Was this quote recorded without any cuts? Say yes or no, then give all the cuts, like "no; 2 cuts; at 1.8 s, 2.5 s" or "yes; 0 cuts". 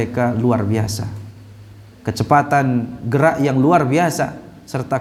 yes; 0 cuts